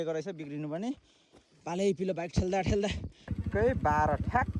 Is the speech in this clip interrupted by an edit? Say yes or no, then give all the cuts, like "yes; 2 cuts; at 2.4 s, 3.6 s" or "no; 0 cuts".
yes; 1 cut; at 3.3 s